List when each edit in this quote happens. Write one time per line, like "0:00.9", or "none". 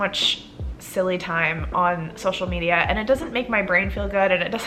none